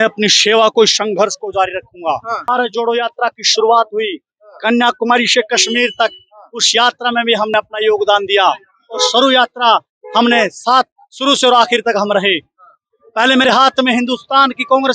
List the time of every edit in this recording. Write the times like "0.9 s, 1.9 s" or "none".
2.5 s

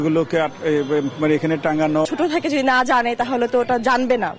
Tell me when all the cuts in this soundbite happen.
2.1 s

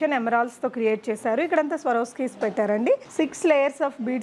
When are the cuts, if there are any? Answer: 3.1 s

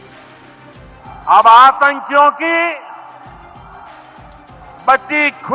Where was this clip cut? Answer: 1.0 s

